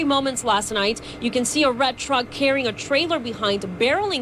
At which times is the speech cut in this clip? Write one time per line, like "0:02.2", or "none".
0:03.0